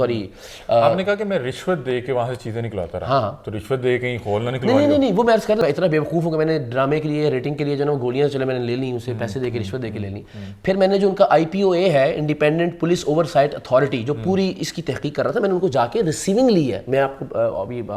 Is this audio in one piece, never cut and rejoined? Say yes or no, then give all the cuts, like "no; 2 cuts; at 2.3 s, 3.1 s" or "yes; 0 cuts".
no; 1 cut; at 5.6 s